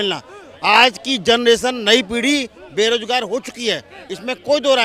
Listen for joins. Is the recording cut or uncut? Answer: uncut